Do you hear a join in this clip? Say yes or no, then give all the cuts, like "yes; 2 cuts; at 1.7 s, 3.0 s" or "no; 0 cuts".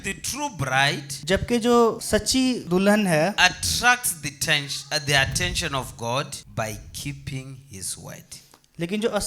yes; 3 cuts; at 1.1 s, 2.3 s, 6.4 s